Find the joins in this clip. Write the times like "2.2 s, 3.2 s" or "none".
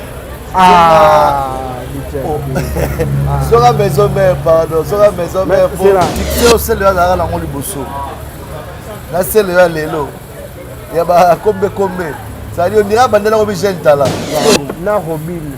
6.2 s, 14.2 s